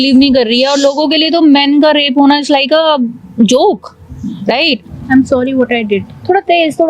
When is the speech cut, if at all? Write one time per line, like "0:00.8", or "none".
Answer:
0:04.8